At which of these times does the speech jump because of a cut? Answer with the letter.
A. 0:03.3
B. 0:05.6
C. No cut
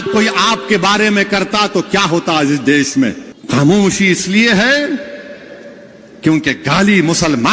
A